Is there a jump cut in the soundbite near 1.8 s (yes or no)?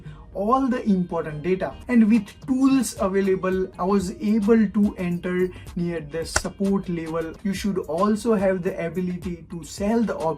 yes